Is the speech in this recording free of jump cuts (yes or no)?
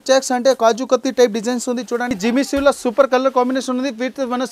no